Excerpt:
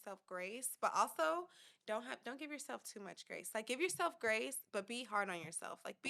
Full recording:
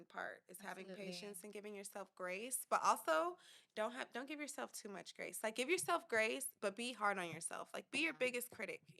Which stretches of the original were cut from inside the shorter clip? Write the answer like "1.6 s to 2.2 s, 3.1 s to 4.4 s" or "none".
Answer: none